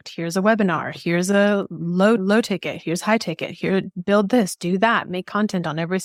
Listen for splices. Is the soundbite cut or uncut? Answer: uncut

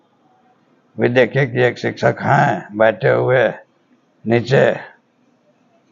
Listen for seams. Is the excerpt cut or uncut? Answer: uncut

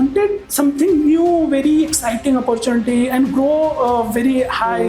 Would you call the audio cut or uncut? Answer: uncut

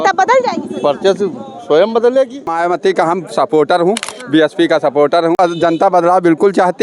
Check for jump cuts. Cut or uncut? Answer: cut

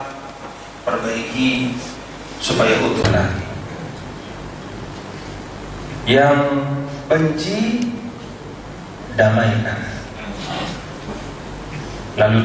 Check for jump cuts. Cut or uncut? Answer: uncut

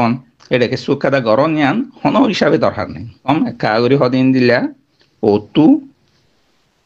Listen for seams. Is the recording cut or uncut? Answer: cut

